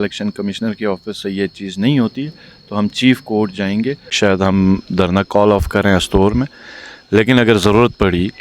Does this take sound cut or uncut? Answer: cut